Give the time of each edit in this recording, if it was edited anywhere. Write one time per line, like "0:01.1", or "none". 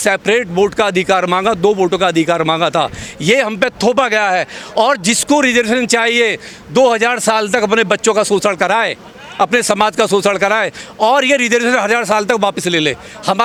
none